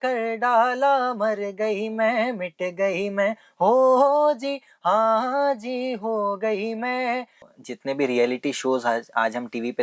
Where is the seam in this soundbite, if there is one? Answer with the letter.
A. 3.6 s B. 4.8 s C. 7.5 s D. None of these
C